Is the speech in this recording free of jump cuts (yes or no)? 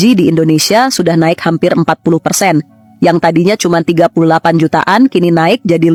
yes